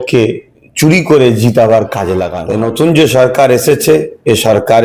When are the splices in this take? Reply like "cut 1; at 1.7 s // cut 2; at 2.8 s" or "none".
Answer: cut 1; at 2.3 s